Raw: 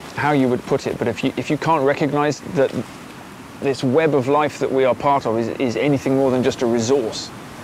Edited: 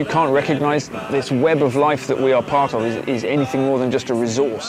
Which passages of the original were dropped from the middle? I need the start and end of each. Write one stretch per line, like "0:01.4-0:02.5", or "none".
0:02.4-0:03.4